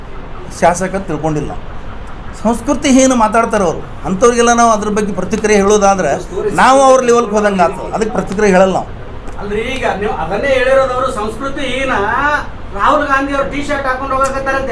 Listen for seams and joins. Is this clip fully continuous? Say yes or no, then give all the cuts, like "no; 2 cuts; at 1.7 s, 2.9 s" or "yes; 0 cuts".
yes; 0 cuts